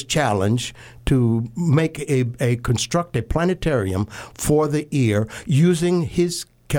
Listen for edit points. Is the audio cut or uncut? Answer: uncut